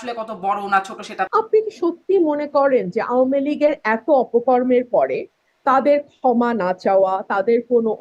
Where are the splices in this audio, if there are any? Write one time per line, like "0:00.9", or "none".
0:01.3